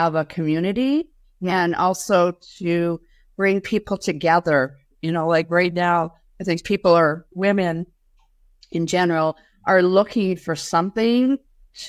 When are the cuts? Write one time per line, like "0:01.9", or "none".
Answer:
none